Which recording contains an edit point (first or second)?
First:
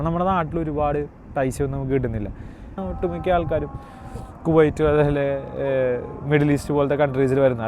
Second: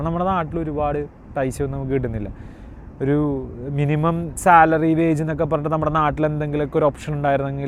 first